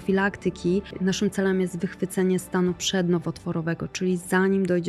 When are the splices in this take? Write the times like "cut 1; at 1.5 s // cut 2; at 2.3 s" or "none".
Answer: cut 1; at 0.9 s